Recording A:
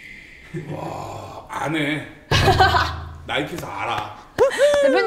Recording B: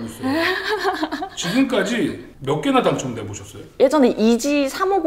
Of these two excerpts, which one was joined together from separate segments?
B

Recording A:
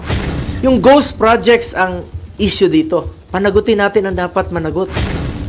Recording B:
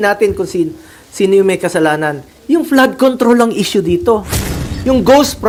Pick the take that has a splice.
A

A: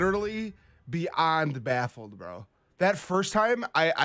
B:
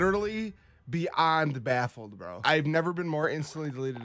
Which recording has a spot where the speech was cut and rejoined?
B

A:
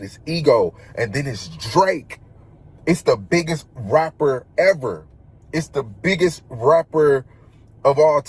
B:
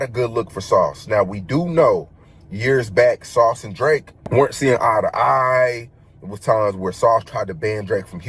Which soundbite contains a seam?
B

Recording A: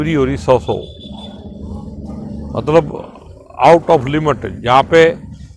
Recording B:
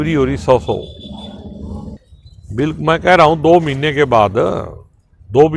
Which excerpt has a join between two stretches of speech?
B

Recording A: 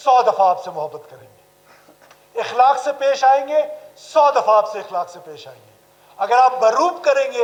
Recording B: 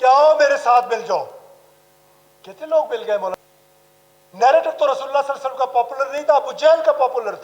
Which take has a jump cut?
B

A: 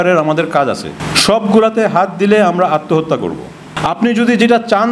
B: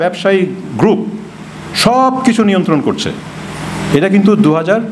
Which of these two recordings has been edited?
A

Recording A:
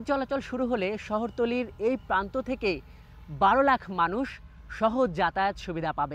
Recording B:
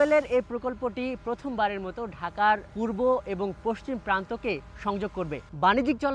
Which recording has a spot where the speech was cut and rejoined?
B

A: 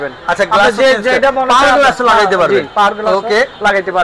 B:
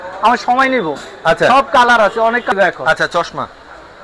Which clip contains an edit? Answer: B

